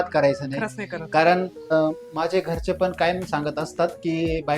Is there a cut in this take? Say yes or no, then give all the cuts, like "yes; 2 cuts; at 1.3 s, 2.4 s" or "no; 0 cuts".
yes; 1 cut; at 1.7 s